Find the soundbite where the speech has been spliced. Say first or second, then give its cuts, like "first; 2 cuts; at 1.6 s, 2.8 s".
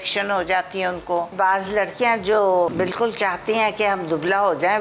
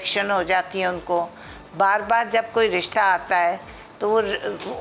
first; 2 cuts; at 1.3 s, 2.7 s